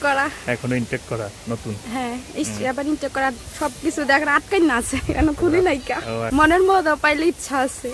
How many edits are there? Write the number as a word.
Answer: one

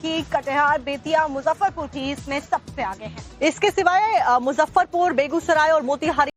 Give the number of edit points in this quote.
zero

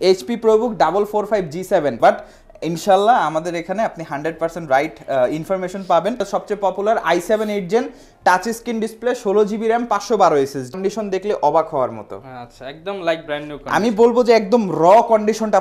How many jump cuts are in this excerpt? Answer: three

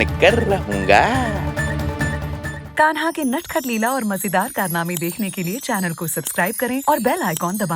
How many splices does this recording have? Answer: one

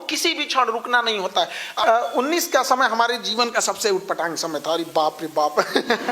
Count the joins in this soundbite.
one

